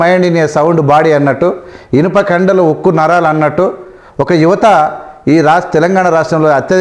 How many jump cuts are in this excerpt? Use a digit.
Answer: 0